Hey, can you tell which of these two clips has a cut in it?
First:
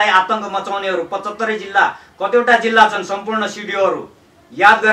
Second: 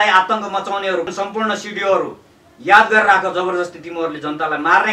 second; 1 cut; at 1.1 s

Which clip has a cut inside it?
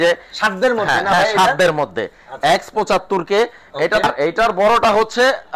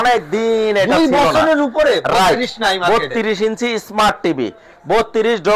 first; 1 cut; at 4.0 s

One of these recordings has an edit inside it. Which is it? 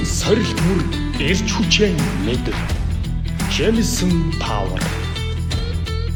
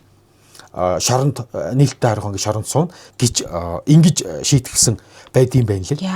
second; 1 cut; at 3.0 s

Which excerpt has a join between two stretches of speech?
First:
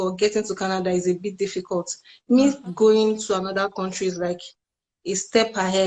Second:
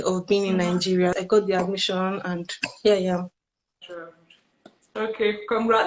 second; 1 cut; at 1.2 s

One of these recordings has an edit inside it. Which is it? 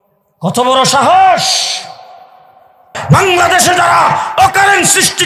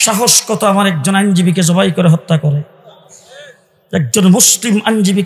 first; 1 cut; at 3.0 s

